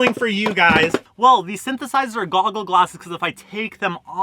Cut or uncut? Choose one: cut